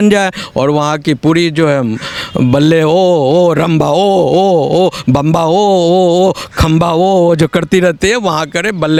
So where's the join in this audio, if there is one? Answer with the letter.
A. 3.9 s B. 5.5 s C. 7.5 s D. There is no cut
D